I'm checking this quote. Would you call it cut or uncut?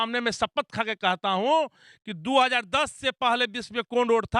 uncut